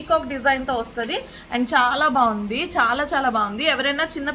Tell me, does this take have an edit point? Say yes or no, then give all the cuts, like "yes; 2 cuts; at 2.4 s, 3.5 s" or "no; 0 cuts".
no; 0 cuts